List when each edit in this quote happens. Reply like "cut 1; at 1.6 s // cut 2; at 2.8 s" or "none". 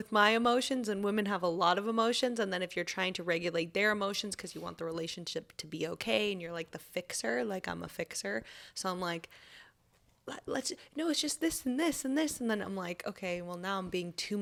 none

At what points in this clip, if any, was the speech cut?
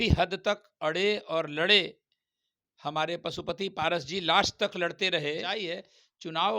cut 1; at 5.6 s

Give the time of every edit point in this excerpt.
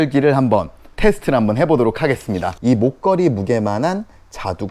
cut 1; at 2.5 s

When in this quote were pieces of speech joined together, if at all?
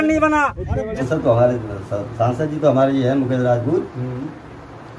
cut 1; at 1.0 s

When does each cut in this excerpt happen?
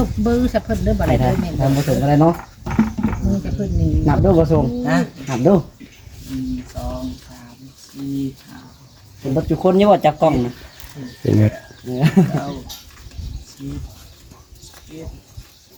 none

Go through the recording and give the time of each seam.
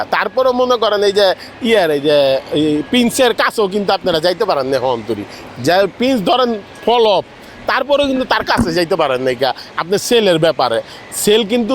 none

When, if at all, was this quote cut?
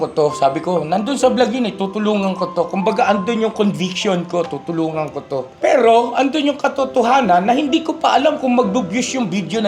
cut 1; at 5.5 s

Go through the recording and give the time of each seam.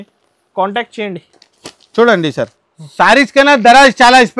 cut 1; at 2.6 s

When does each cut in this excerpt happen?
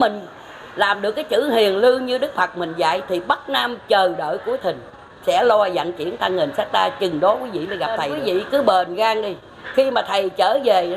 cut 1; at 8.1 s

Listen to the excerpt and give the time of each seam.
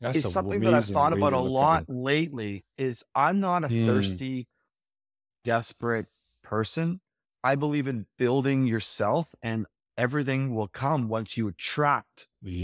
none

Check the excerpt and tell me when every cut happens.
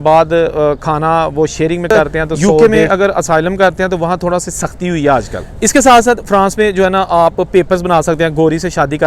cut 1; at 2.6 s // cut 2; at 5.4 s

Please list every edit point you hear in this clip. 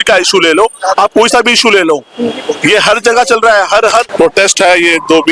cut 1; at 4.1 s

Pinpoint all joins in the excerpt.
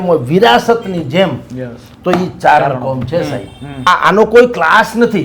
cut 1; at 3.9 s

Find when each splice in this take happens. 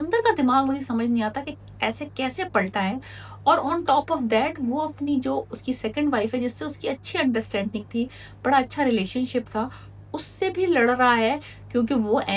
none

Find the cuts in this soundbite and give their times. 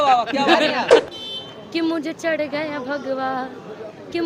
cut 1; at 1.1 s

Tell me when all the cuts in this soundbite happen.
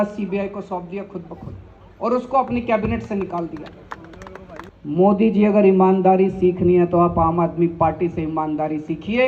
cut 1; at 4.6 s

